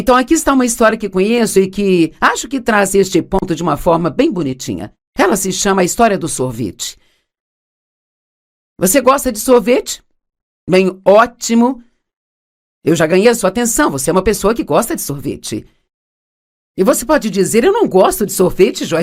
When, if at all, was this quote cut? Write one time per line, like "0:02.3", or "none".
none